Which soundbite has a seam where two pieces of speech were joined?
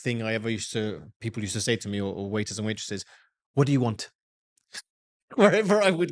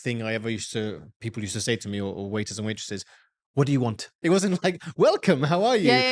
second; 1 cut; at 4.1 s

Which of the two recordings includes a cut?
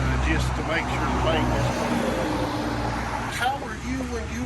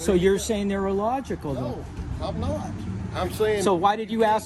first; 1 cut; at 3.3 s

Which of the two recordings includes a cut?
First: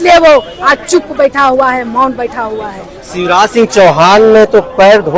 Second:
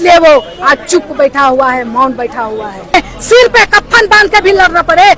second; 1 cut; at 2.9 s

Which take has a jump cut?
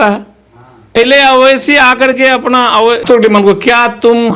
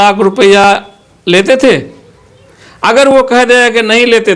first; 2 cuts; at 1.0 s, 3.0 s

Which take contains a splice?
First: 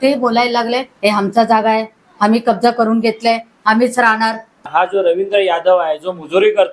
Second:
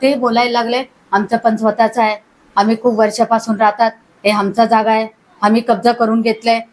first; 2 cuts; at 0.9 s, 4.6 s

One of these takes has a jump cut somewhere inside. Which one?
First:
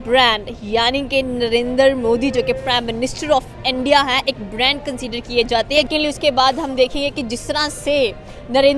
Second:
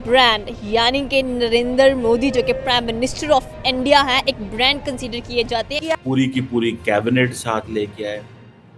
second; 1 cut; at 5.7 s

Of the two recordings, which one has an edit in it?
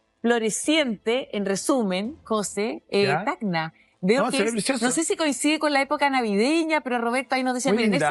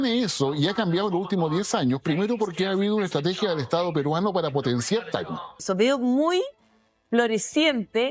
second; 1 cut; at 5.6 s

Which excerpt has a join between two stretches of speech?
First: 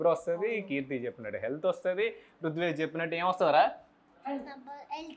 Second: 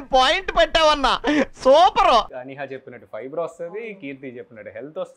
second; 1 cut; at 2.3 s

